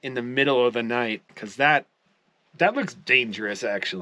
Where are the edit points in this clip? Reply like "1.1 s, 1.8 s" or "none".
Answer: 1.3 s